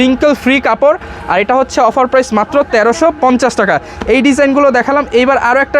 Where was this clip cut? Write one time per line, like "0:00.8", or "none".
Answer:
none